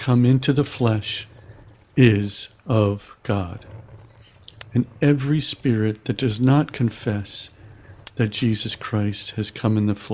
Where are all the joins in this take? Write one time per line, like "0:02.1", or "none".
none